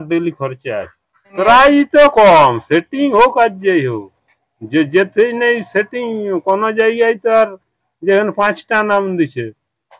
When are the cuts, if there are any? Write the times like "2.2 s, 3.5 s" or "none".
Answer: 1.3 s